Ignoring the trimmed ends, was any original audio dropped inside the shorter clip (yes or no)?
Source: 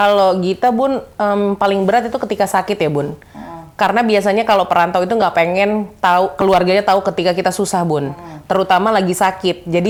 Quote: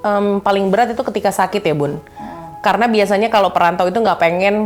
no